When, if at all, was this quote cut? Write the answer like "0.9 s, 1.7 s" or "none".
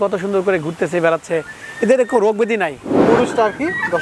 2.9 s